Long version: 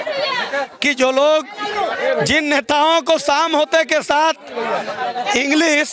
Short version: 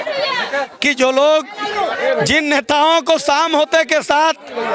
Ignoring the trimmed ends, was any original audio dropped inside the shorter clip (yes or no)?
no